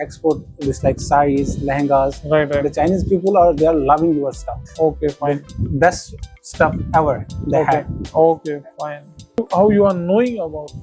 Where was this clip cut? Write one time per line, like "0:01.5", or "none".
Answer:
0:09.3